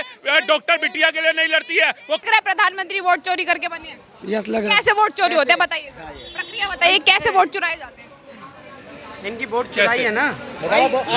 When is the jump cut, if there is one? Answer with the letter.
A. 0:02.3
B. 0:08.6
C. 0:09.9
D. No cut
A